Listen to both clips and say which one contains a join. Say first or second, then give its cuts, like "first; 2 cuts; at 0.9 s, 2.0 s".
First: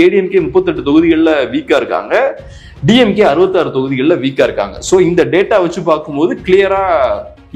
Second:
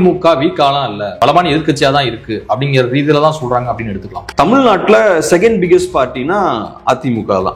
second; 2 cuts; at 1.1 s, 4.3 s